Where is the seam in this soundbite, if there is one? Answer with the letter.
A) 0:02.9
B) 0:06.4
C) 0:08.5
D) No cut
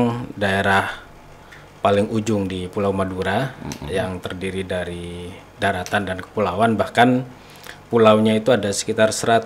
D